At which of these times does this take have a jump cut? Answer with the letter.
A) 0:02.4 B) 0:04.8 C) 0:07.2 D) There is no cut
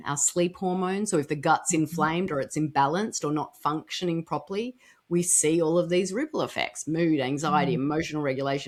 D